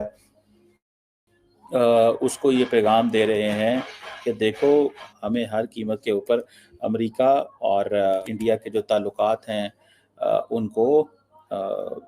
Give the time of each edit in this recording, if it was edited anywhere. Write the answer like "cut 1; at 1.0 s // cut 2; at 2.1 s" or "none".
cut 1; at 5.1 s // cut 2; at 8.2 s